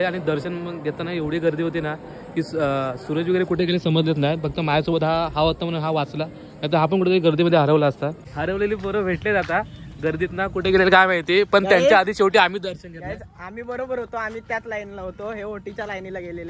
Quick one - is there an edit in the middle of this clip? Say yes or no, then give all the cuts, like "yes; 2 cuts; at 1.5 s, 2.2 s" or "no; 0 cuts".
yes; 1 cut; at 8.2 s